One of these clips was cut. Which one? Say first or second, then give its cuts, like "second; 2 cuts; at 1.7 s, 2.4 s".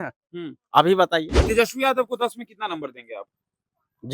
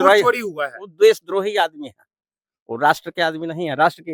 first; 1 cut; at 1.4 s